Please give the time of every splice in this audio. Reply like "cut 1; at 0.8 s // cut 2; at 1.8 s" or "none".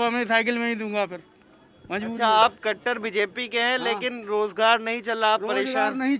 none